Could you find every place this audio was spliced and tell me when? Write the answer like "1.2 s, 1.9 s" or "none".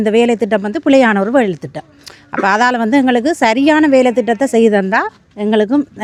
none